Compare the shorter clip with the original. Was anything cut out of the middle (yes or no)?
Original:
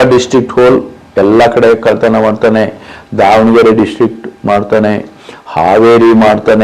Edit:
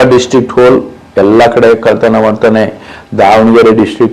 no